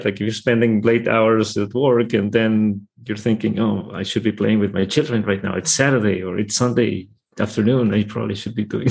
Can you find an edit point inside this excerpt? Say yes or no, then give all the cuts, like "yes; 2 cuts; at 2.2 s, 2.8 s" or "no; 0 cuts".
no; 0 cuts